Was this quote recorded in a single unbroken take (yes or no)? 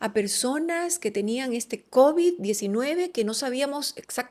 yes